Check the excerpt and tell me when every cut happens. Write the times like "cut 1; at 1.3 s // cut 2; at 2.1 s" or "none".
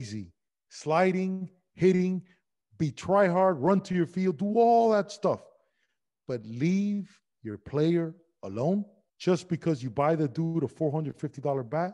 cut 1; at 9.0 s